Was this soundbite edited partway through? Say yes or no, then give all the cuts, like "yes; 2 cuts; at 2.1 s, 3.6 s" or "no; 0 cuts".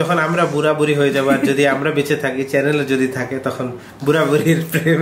no; 0 cuts